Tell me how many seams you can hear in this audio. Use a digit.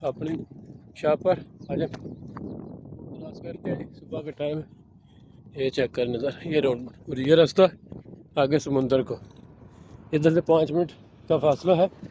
0